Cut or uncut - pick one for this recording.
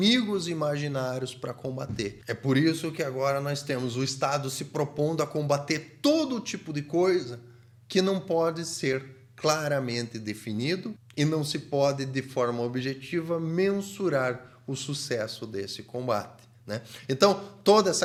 uncut